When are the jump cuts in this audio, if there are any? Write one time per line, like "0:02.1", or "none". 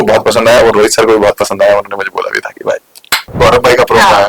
0:03.3